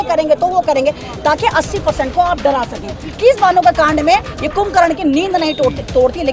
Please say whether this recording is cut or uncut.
cut